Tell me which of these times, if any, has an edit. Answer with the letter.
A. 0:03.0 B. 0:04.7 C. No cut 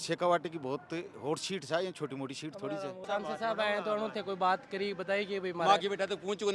A